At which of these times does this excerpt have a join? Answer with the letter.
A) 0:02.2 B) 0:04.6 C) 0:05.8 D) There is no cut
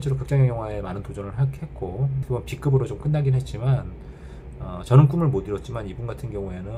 A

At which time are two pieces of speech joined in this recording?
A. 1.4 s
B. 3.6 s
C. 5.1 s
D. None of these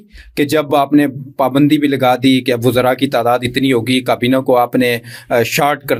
D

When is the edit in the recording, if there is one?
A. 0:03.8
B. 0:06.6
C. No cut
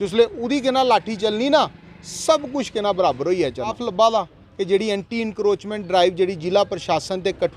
A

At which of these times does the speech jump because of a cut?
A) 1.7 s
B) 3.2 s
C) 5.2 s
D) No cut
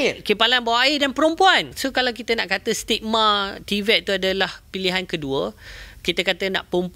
A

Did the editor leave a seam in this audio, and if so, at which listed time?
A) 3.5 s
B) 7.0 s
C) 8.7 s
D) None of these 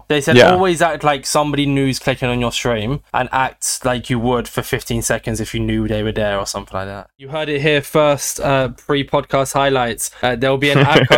B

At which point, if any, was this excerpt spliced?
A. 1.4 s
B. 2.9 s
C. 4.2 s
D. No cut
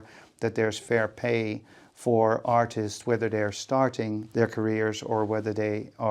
C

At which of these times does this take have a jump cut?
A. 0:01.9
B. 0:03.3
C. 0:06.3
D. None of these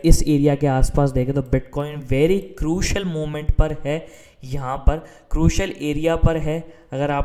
D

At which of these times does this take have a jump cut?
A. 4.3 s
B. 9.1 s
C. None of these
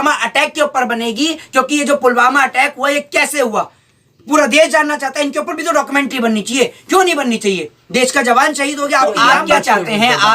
B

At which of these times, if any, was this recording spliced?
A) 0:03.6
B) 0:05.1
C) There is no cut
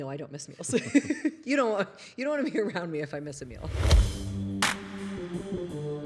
A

